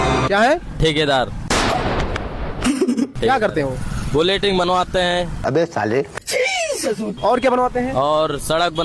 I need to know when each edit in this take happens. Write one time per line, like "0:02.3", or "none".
none